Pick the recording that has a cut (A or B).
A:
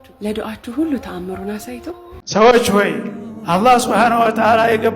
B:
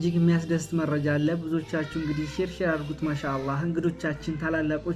A